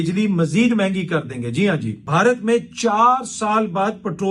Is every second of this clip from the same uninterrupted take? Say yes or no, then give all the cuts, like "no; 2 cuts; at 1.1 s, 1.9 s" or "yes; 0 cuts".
no; 1 cut; at 2.0 s